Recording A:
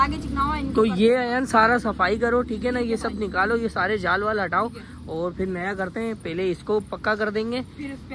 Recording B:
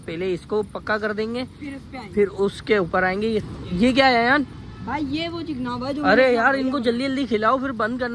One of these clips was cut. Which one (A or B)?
B